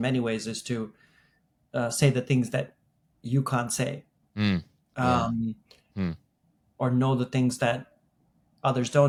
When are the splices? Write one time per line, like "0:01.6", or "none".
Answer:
none